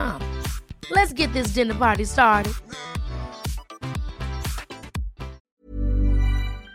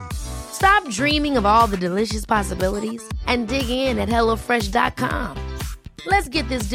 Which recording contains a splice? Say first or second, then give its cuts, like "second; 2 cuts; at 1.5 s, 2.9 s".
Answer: first; 1 cut; at 5.5 s